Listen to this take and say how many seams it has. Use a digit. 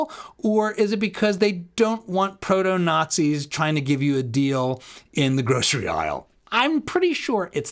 0